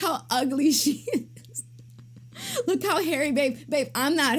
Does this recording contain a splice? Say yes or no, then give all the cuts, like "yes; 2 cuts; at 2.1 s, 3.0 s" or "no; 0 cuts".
no; 0 cuts